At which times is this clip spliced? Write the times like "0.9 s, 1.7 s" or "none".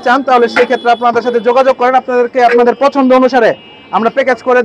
none